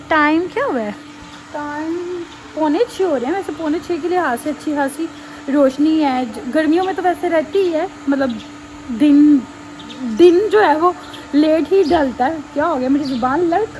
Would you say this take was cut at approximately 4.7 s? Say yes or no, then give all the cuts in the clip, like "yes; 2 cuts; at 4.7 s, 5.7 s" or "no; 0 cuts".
no; 0 cuts